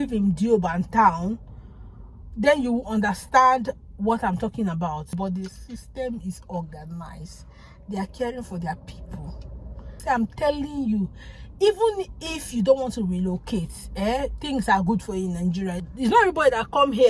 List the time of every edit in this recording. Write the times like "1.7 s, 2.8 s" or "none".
5.2 s, 9.9 s, 15.8 s